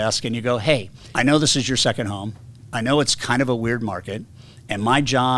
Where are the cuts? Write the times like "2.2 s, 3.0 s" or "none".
1.0 s

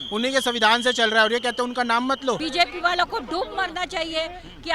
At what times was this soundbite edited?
2.4 s

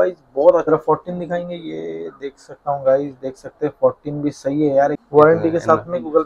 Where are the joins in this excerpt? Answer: 0.7 s, 5.0 s

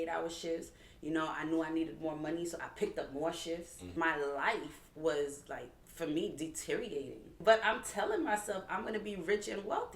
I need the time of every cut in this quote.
3.8 s, 7.3 s

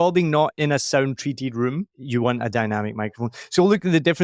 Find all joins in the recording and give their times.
2.0 s

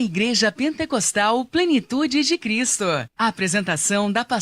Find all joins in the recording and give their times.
3.1 s

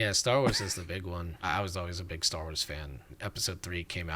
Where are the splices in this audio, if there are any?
1.5 s, 3.1 s

